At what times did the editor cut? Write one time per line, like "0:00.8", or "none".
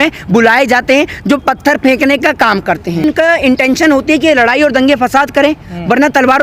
0:03.0